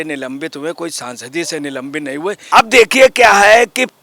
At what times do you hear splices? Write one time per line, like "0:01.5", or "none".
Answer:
0:02.4